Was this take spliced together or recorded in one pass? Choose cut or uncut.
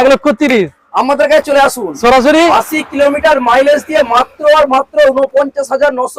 uncut